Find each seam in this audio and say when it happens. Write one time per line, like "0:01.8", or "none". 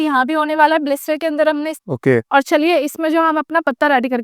0:01.8